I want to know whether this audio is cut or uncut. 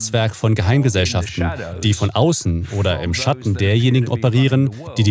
uncut